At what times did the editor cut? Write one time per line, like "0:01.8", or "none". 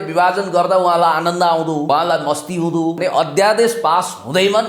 0:01.9
0:03.0